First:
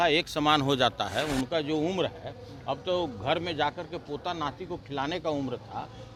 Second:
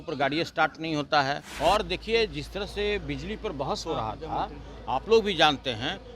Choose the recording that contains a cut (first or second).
second